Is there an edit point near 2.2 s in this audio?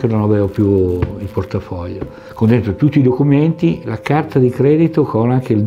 yes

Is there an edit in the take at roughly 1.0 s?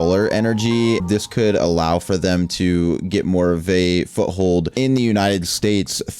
yes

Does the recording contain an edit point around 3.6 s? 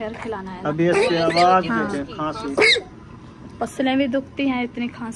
no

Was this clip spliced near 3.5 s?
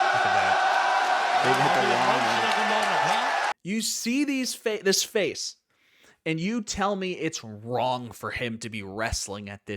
yes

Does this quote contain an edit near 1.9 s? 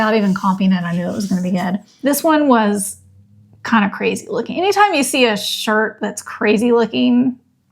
yes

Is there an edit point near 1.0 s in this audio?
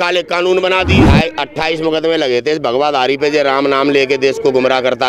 yes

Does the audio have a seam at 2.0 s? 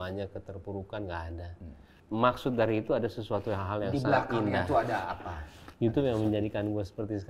yes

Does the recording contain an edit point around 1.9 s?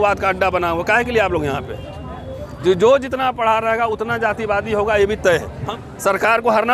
no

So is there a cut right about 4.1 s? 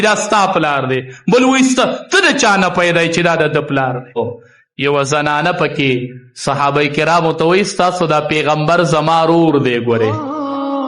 yes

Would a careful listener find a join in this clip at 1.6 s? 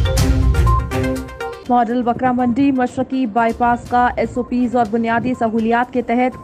yes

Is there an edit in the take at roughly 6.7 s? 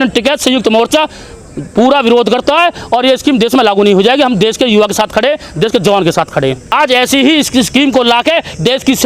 yes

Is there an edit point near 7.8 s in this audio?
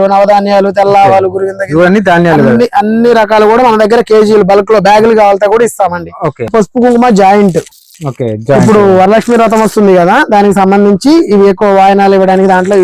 no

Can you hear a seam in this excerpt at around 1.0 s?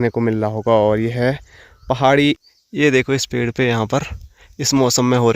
no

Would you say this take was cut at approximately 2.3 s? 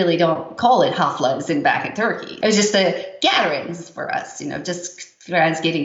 yes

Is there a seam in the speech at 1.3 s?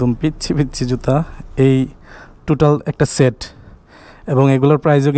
no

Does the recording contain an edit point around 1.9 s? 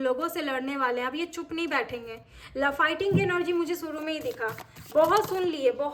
no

